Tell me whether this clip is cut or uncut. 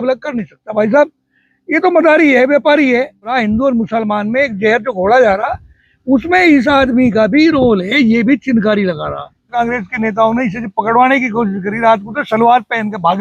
cut